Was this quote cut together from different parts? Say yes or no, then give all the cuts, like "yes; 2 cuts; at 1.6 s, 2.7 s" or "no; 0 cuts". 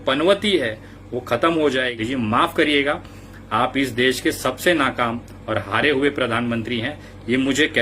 yes; 1 cut; at 1.9 s